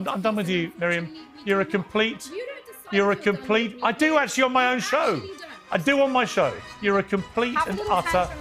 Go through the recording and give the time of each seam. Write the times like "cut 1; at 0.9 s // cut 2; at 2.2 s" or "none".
none